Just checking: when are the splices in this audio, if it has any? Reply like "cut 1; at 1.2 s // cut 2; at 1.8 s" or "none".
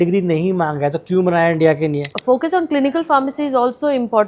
cut 1; at 2.1 s